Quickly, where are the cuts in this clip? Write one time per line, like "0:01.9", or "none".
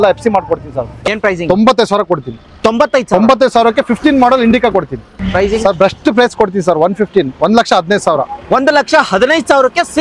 0:00.9
0:05.1